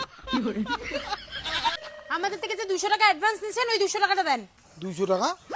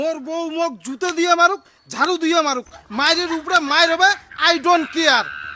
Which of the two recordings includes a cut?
first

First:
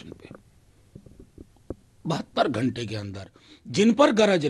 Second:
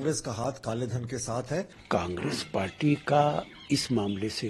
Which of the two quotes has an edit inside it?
second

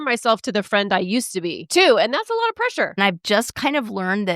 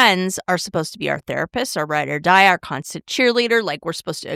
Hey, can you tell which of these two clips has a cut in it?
first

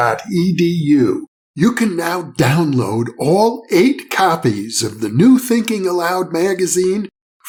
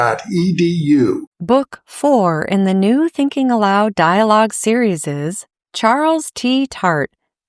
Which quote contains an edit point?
second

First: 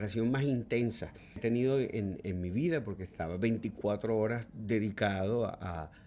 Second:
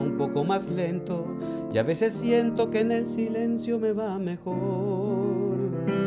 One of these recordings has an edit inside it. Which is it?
first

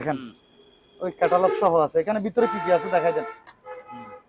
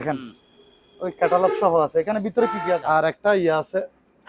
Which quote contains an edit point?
second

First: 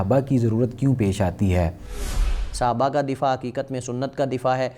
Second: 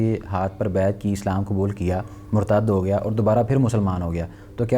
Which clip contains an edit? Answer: first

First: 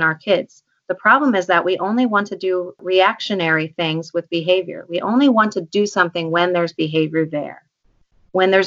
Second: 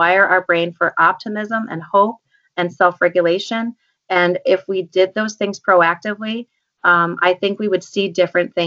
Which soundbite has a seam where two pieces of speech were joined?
first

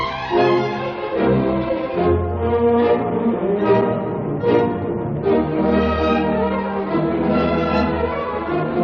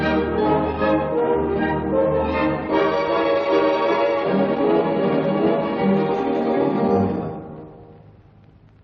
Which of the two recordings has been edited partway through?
second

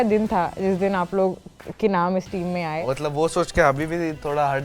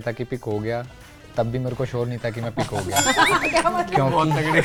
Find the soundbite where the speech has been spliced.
first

